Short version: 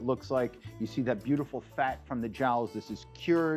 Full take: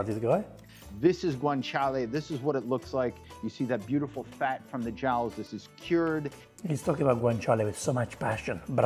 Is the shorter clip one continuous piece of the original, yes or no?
yes